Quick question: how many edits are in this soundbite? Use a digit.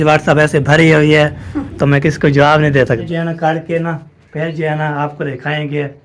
1